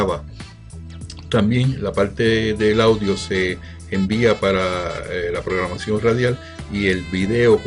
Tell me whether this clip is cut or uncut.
cut